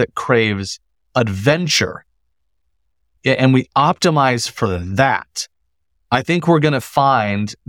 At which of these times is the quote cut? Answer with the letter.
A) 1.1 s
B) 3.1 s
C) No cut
B